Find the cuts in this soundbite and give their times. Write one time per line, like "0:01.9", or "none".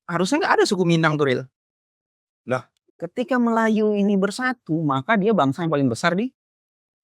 0:02.8